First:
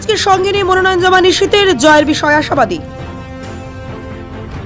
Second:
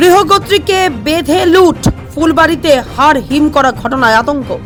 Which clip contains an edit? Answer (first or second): first